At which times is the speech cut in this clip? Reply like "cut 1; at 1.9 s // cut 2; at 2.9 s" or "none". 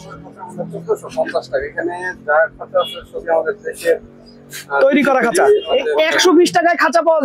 cut 1; at 5.8 s